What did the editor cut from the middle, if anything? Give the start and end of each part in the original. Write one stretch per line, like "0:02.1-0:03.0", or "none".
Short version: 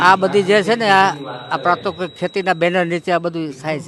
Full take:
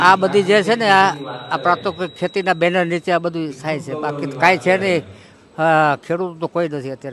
none